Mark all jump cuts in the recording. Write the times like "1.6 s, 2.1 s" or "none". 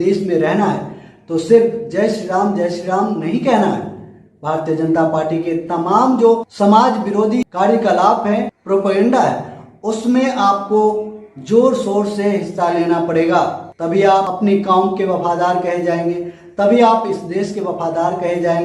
7.5 s, 14.3 s